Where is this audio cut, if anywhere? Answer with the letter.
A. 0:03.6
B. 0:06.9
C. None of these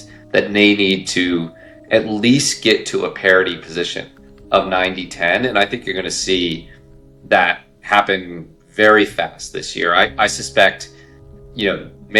C